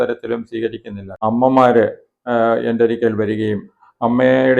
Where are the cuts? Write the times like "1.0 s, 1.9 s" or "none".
1.0 s